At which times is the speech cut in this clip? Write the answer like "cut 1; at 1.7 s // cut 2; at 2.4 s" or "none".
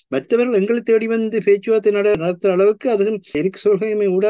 cut 1; at 2.1 s // cut 2; at 3.4 s

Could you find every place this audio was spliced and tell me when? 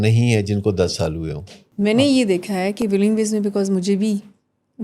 cut 1; at 1.8 s

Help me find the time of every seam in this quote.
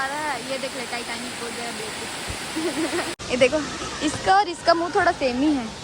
cut 1; at 3.2 s

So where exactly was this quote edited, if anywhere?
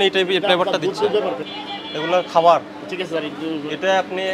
cut 1; at 1.5 s

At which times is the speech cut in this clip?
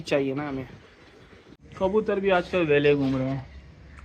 cut 1; at 1.5 s

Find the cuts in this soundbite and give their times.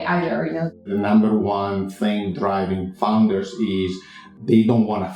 cut 1; at 0.9 s // cut 2; at 4.2 s

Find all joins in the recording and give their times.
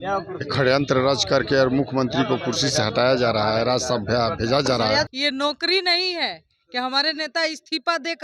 cut 1; at 5.1 s

